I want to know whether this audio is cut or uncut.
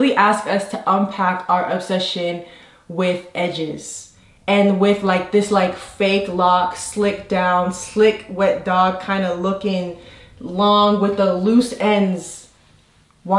uncut